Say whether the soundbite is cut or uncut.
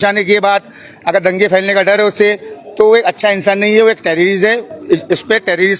uncut